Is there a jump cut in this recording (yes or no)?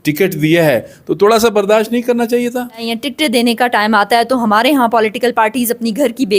yes